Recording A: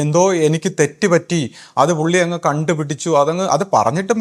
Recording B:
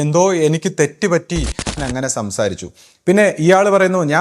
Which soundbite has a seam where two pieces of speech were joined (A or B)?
B